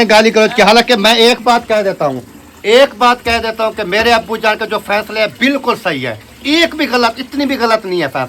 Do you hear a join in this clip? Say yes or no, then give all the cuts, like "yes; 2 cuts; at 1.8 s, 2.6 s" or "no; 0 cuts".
no; 0 cuts